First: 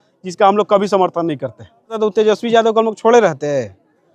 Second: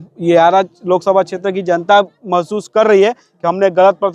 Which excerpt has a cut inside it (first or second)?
first